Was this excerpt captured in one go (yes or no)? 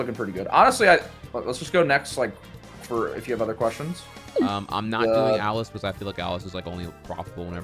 no